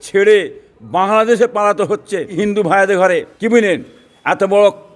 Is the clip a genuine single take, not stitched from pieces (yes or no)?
no